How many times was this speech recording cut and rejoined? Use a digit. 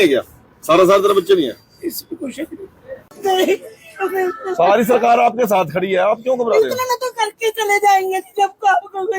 1